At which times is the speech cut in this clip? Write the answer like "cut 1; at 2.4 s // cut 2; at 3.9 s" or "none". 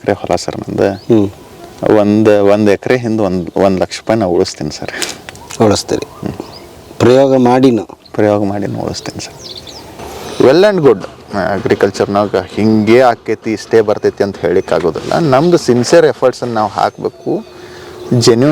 cut 1; at 10.0 s